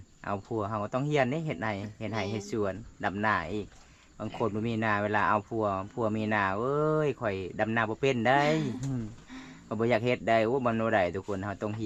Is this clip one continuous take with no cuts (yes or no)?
yes